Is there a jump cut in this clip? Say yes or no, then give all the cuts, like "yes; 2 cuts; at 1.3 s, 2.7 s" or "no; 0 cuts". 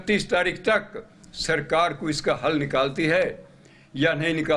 no; 0 cuts